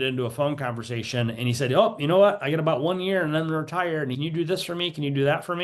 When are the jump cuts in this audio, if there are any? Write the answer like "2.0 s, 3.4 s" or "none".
4.1 s

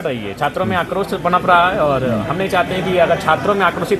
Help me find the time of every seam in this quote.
none

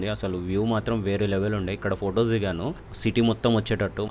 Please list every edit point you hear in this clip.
none

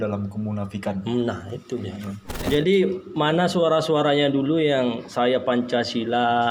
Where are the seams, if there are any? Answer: 2.3 s

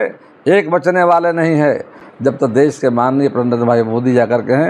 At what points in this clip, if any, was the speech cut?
none

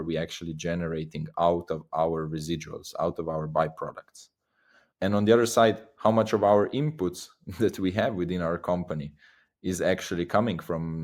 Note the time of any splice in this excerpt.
none

